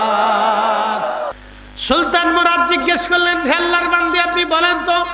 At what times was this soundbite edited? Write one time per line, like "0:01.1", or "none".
0:01.3